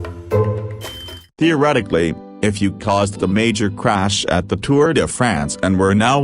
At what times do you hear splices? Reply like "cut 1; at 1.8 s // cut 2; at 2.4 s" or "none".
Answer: cut 1; at 1.3 s